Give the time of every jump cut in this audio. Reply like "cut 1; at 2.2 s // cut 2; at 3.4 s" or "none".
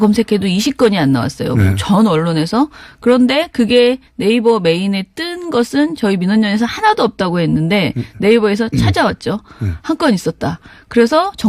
cut 1; at 5.0 s